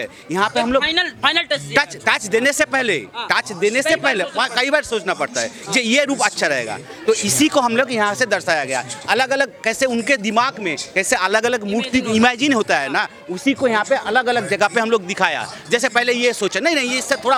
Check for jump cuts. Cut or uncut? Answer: uncut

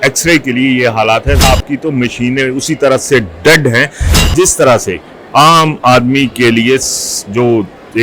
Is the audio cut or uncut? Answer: cut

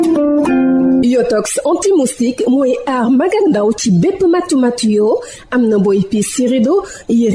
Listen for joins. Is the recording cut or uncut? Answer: cut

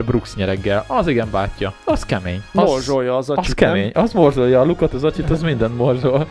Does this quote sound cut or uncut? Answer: cut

